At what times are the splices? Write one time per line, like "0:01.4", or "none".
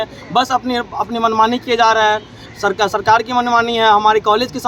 none